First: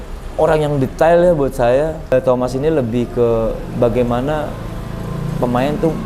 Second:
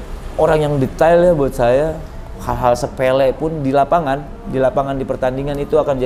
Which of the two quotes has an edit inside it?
first; 1 cut; at 2.1 s

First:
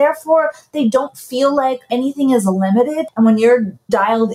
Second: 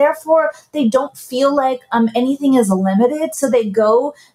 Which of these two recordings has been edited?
first; 2 cuts; at 1.9 s, 3.0 s

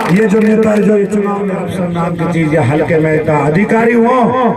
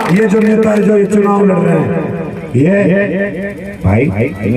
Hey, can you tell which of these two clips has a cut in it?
first; 1 cut; at 1.6 s

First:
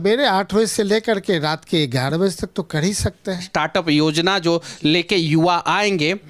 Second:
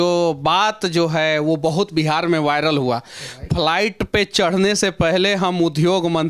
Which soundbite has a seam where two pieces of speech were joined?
first; 1 cut; at 3.4 s

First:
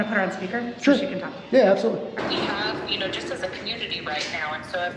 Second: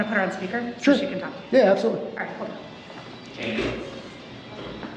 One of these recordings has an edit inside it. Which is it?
first; 1 cut; at 2.2 s

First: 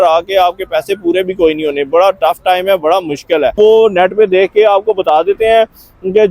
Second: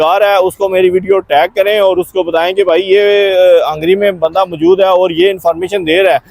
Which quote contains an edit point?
first; 1 cut; at 3.5 s

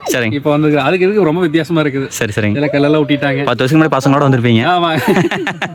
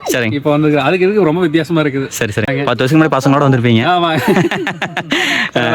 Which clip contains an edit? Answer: second; 1 cut; at 2.5 s

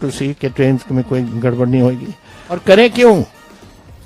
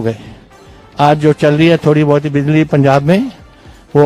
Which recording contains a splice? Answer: first; 1 cut; at 2.6 s

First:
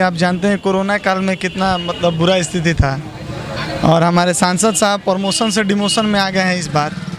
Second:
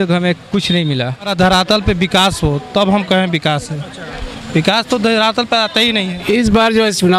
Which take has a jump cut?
second; 2 cuts; at 1.3 s, 6.2 s

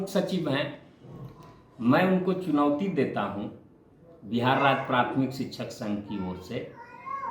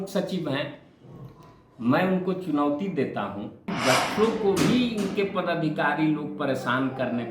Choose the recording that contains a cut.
second; 1 cut; at 3.7 s

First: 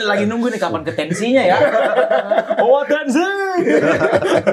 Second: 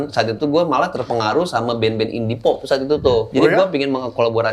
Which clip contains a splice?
second; 1 cut; at 3.3 s

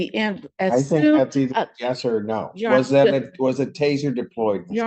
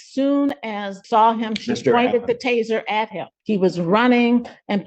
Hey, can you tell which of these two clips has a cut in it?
second; 2 cuts; at 1.0 s, 3.3 s

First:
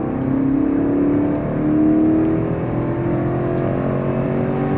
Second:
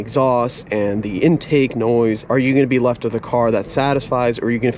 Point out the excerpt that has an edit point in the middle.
second; 1 cut; at 2.2 s

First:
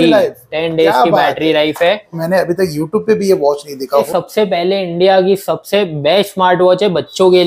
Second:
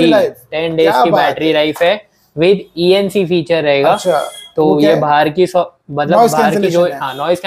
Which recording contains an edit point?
first; 2 cuts; at 2.2 s, 4.1 s

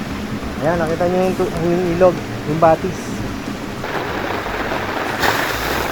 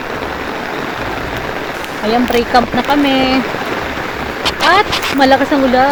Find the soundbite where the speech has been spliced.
first; 1 cut; at 3.8 s

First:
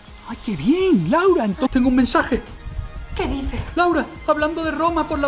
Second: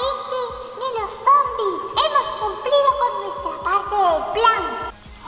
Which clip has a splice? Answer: first; 2 cuts; at 1.7 s, 3.7 s

